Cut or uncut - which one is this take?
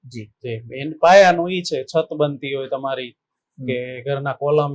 uncut